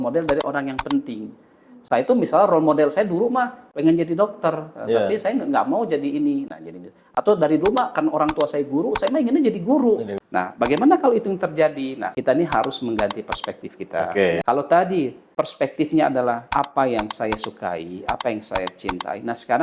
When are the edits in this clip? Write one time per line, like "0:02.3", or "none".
0:10.2
0:12.0
0:14.4
0:15.2
0:16.4